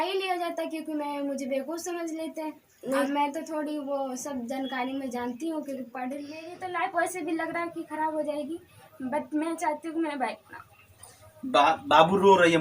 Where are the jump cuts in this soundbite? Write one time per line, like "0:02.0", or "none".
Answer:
0:06.6

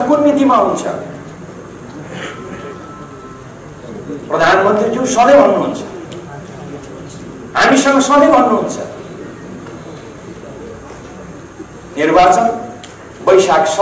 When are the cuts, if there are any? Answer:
none

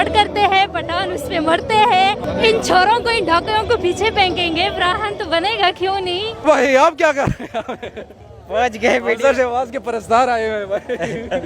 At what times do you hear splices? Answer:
0:02.2
0:06.5

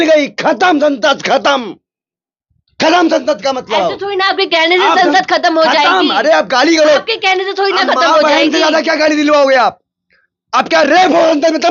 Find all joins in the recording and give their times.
none

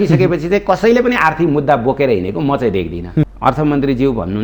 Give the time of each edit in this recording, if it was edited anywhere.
0:03.3

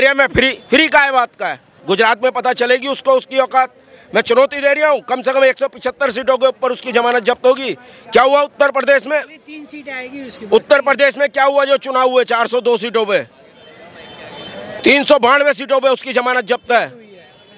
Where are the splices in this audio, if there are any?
0:01.8

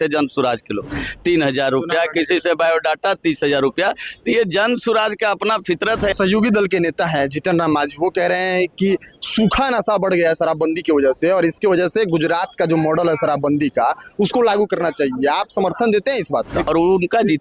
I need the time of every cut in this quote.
0:06.1
0:16.6

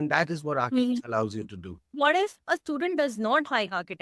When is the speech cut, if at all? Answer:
0:01.9

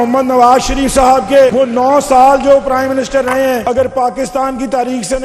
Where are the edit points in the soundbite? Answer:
0:01.5
0:03.6

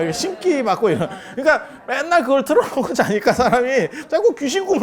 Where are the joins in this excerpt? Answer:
none

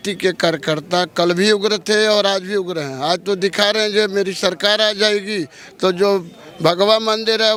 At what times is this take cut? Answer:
none

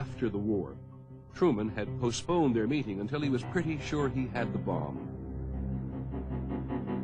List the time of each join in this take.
0:03.1

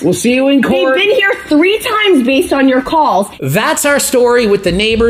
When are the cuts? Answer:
0:03.4

